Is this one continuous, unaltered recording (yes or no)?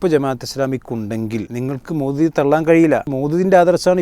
no